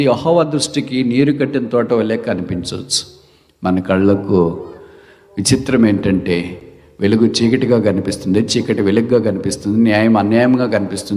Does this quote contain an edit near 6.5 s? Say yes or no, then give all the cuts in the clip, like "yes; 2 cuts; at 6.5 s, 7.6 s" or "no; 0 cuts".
no; 0 cuts